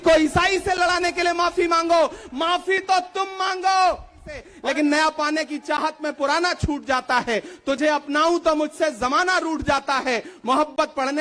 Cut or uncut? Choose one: cut